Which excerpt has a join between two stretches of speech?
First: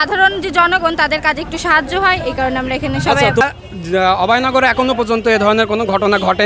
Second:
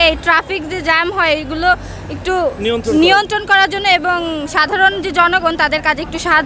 first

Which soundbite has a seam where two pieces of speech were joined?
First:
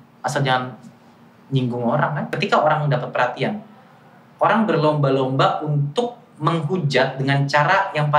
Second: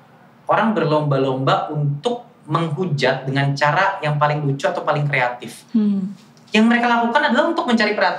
first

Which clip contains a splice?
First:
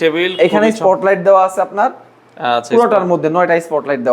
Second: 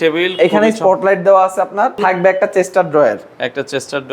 second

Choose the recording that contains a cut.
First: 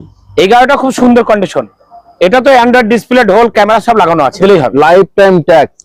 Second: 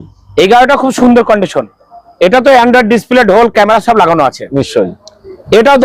first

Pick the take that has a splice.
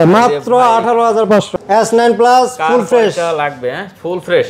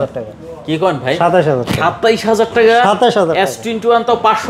first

